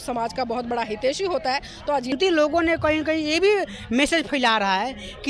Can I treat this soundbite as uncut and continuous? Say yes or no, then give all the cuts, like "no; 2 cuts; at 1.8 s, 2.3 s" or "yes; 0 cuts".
no; 1 cut; at 2.1 s